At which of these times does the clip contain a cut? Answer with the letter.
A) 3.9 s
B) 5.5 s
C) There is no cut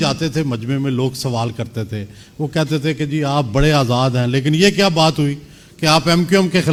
C